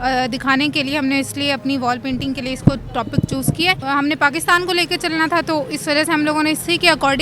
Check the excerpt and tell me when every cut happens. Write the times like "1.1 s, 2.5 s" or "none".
3.8 s